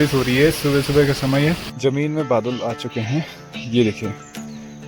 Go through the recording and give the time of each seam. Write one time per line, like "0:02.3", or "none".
0:01.7